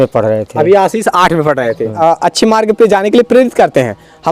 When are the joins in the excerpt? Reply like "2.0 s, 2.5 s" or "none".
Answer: 2.0 s